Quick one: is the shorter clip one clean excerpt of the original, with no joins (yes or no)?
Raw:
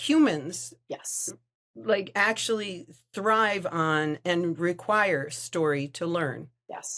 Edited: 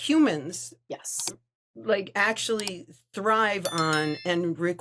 yes